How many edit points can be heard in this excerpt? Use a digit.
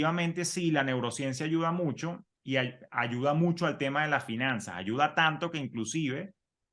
0